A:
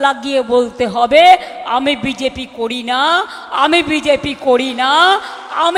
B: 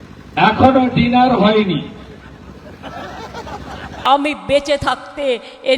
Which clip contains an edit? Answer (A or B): B